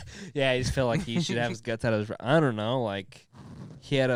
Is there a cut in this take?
no; 0 cuts

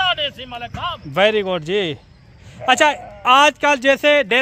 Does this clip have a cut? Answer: no; 0 cuts

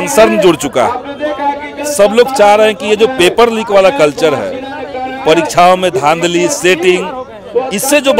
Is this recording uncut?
yes; 0 cuts

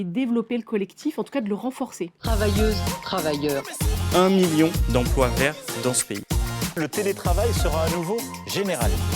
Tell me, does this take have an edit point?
yes; 1 cut; at 2.2 s

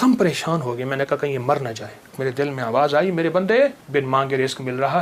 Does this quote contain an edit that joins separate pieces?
yes; 2 cuts; at 2.2 s, 3.8 s

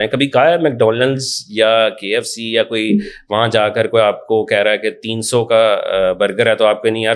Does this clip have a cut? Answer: no; 0 cuts

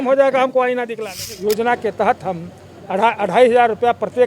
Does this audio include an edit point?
yes; 1 cut; at 1.3 s

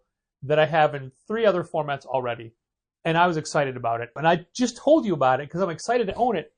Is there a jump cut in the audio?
yes; 1 cut; at 4.2 s

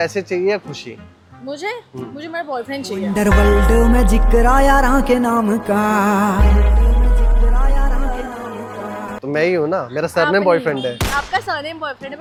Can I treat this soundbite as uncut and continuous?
yes; 0 cuts

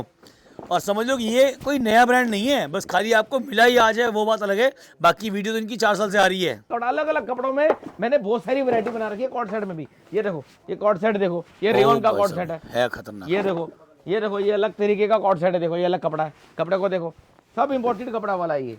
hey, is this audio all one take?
no; 1 cut; at 6.8 s

